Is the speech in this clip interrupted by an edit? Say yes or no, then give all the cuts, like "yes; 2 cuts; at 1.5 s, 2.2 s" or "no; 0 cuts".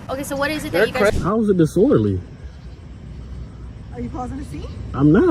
yes; 1 cut; at 1.1 s